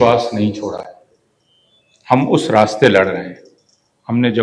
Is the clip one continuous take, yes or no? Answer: yes